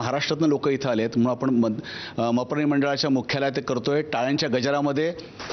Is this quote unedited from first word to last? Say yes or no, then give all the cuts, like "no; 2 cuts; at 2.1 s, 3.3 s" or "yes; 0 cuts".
yes; 0 cuts